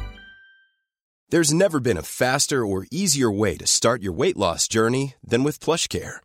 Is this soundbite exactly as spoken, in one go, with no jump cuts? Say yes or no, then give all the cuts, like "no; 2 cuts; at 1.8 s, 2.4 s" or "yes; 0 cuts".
no; 1 cut; at 1.2 s